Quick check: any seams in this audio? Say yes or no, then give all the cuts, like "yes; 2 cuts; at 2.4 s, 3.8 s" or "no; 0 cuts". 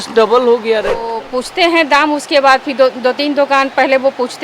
yes; 1 cut; at 1.2 s